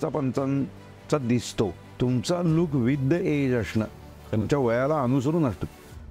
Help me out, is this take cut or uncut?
cut